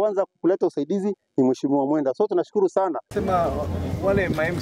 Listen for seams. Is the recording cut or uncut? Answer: cut